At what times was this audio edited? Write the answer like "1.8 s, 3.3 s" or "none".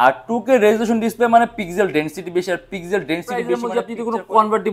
3.6 s